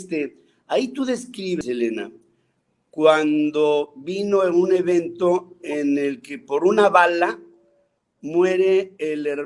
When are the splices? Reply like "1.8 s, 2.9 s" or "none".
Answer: 1.6 s